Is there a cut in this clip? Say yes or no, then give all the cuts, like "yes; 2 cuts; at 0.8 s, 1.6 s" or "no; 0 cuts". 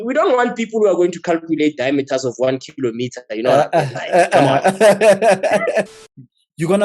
yes; 1 cut; at 5.9 s